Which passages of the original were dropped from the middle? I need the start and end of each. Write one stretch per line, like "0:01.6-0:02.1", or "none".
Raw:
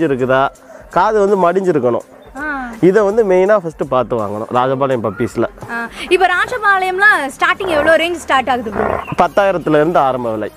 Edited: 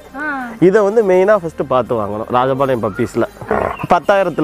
0:05.6-0:08.7